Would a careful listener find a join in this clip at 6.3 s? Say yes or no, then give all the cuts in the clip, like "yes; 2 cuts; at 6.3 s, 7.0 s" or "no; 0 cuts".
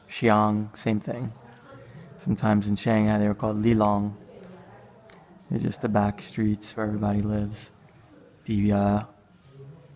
no; 0 cuts